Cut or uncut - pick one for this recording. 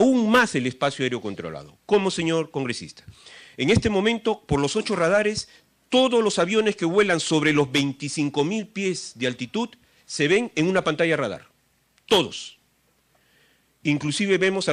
uncut